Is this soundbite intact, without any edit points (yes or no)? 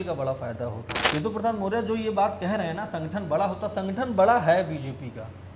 no